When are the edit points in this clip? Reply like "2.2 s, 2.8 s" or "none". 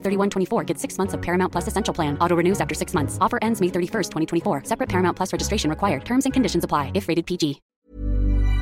7.7 s